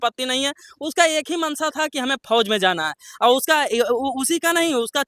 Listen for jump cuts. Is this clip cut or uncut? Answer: uncut